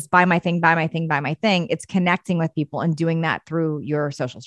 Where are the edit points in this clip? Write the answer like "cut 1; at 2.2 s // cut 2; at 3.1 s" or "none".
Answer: none